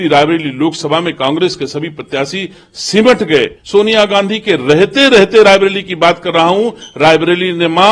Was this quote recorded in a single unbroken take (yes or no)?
no